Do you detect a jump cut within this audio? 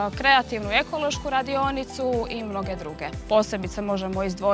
yes; 1 cut; at 3.2 s

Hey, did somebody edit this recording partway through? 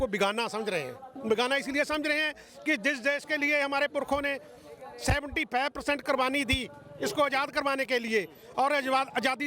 no; 0 cuts

